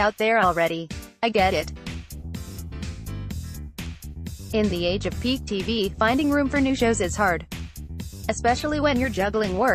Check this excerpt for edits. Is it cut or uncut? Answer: uncut